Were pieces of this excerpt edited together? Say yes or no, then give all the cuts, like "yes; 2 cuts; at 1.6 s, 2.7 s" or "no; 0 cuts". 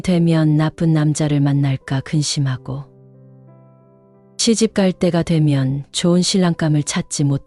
no; 0 cuts